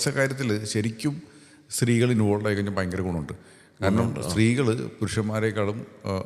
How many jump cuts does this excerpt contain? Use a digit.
0